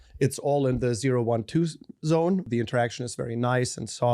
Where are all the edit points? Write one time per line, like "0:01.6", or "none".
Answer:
0:02.5